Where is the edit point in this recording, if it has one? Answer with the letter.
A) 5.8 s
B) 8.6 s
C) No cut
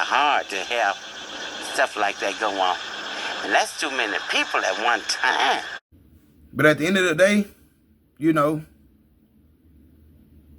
A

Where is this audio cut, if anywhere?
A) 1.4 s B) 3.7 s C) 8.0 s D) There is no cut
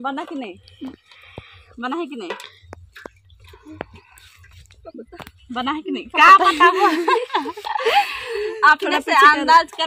D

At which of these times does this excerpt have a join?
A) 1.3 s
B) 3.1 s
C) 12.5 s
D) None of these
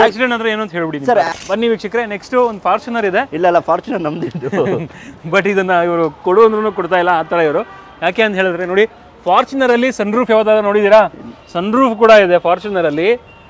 A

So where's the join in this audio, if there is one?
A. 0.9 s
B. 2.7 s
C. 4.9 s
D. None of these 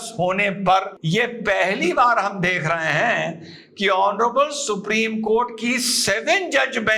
A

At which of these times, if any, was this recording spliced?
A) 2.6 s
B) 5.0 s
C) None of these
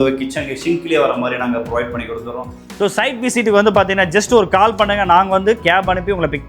A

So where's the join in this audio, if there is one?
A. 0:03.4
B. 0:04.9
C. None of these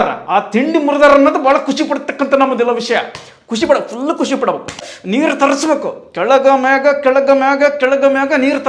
B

